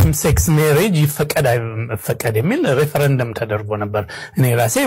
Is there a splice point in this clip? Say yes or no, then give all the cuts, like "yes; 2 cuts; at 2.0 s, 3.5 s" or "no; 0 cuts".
no; 0 cuts